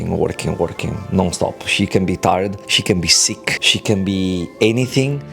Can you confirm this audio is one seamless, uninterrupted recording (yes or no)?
no